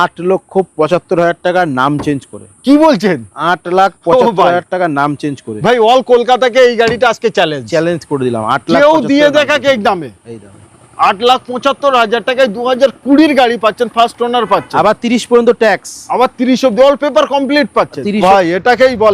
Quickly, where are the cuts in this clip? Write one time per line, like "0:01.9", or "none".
0:18.2